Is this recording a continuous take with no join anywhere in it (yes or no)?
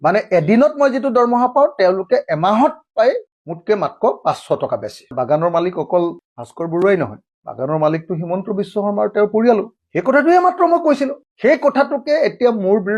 no